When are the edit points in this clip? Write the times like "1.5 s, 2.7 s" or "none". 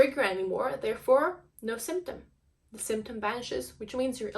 1.5 s